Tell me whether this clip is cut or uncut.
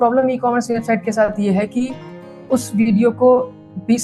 uncut